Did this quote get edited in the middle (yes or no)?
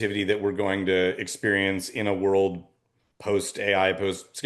no